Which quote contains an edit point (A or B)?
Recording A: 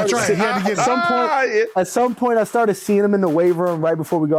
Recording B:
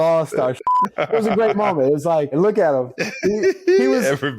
B